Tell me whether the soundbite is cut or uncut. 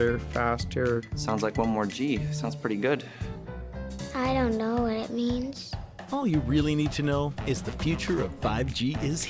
uncut